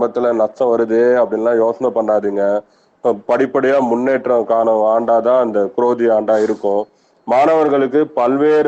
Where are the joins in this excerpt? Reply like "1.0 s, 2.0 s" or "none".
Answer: 7.0 s